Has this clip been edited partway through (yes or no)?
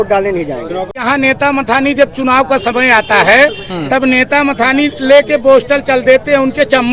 yes